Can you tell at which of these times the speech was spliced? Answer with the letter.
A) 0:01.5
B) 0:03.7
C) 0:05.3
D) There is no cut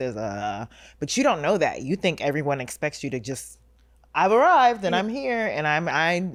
D